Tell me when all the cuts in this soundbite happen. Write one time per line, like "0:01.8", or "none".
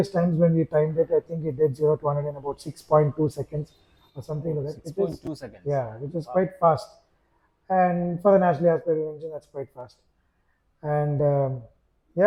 none